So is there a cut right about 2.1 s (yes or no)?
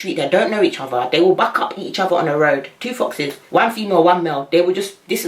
no